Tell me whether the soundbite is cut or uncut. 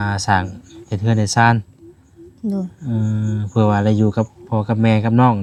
uncut